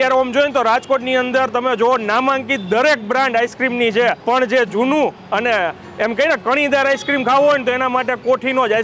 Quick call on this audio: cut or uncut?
cut